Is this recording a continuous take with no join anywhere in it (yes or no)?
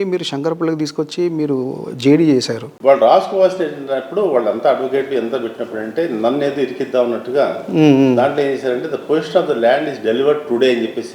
no